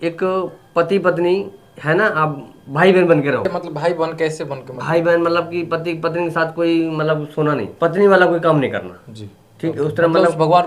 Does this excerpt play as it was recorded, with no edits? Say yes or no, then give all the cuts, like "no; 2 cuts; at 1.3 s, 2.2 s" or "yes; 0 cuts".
no; 2 cuts; at 3.5 s, 7.9 s